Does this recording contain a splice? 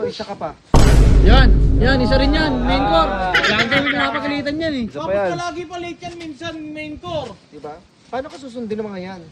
no; 0 cuts

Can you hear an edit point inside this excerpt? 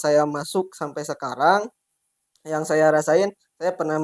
no; 0 cuts

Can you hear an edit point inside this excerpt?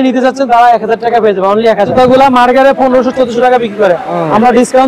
yes; 1 cut; at 1.9 s

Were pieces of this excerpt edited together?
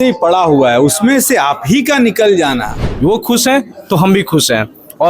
yes; 1 cut; at 2.8 s

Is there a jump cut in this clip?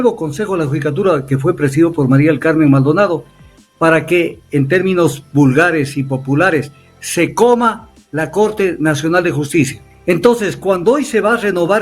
yes; 1 cut; at 9.9 s

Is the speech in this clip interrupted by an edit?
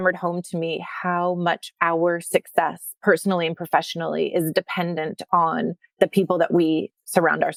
no; 0 cuts

